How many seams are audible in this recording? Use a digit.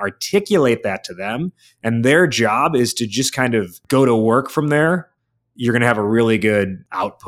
2